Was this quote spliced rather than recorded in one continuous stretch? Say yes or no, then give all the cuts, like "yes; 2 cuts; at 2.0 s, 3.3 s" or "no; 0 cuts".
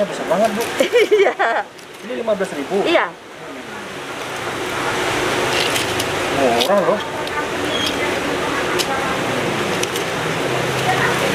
no; 0 cuts